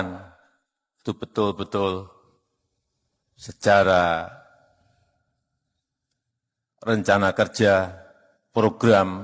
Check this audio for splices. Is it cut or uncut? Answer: uncut